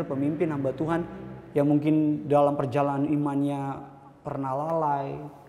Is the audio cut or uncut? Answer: uncut